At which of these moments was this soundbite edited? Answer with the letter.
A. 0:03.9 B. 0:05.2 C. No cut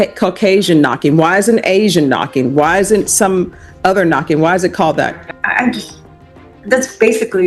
B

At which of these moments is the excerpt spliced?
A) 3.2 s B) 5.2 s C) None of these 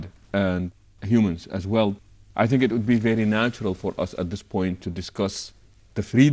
A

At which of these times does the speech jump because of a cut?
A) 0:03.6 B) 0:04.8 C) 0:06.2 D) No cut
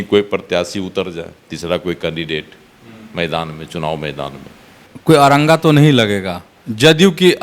B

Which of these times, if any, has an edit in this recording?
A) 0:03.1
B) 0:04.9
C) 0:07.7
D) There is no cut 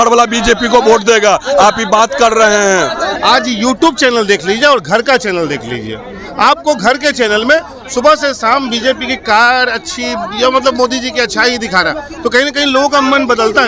A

